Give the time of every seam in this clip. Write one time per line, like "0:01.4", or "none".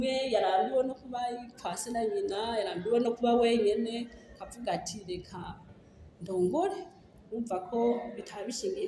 none